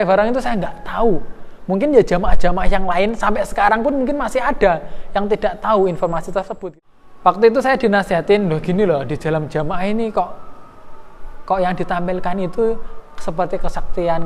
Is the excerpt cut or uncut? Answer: cut